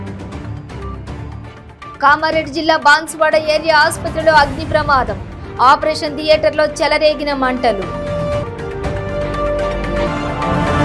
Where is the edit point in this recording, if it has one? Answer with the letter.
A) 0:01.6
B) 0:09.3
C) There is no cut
C